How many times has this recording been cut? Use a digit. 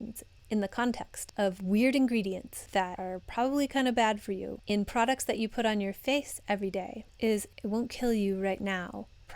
3